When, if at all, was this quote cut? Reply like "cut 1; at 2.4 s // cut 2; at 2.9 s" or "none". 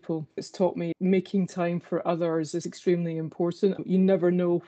cut 1; at 0.9 s // cut 2; at 2.6 s // cut 3; at 3.8 s